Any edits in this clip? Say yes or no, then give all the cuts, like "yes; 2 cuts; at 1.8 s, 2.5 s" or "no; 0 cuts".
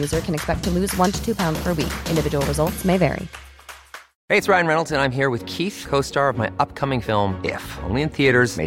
yes; 1 cut; at 3.8 s